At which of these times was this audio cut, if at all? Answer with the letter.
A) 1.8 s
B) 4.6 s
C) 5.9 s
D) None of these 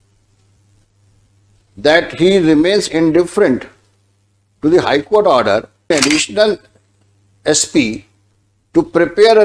C